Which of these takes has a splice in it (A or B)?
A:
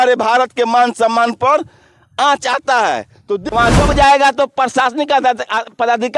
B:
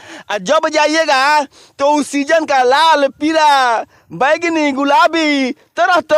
A